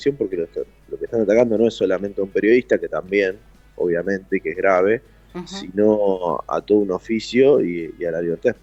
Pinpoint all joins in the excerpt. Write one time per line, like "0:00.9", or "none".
none